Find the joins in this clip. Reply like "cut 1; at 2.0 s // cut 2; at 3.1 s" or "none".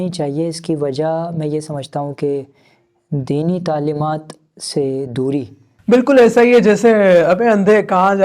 cut 1; at 5.7 s